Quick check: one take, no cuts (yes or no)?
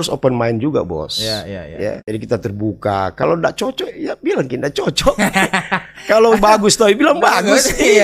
no